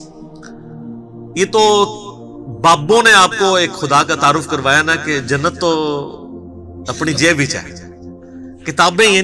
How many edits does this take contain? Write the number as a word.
one